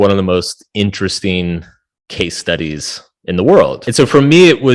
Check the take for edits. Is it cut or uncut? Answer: cut